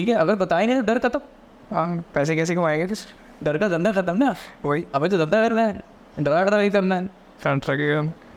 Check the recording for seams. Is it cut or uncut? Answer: uncut